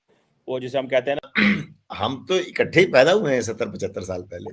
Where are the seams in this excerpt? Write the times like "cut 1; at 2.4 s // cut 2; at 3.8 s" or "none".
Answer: cut 1; at 1.2 s